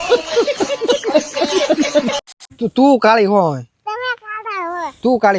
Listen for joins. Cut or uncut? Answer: cut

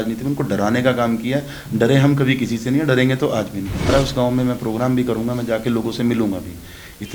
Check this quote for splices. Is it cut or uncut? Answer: cut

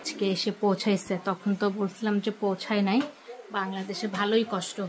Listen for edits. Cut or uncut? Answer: uncut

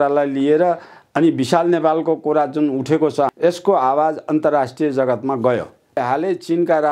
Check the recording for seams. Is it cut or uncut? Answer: cut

